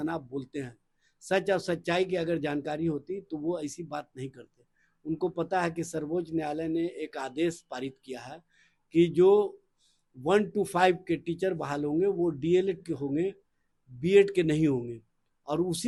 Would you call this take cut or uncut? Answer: uncut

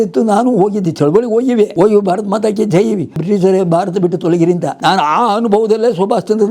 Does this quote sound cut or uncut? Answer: cut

